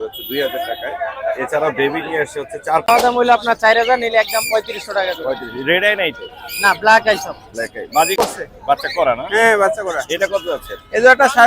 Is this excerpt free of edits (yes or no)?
no